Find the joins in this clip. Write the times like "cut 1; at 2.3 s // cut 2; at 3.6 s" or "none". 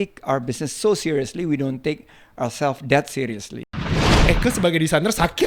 cut 1; at 3.9 s